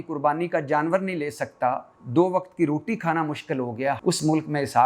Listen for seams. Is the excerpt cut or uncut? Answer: cut